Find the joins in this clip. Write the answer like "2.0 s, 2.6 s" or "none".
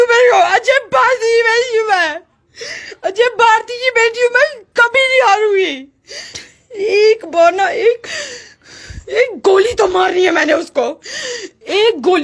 6.5 s